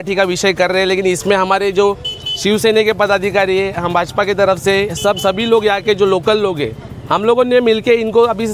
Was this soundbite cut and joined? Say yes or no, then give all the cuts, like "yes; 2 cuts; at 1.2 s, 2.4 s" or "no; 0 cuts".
no; 0 cuts